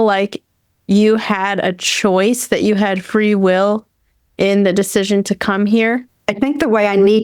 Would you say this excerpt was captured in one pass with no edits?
no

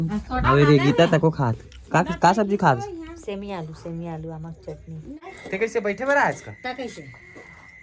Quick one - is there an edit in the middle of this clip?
yes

